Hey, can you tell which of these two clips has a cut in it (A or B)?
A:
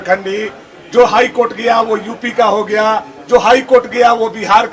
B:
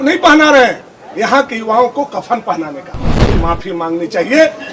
B